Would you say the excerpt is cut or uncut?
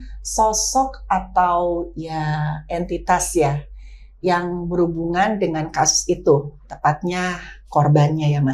uncut